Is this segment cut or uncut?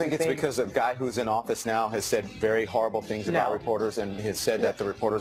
uncut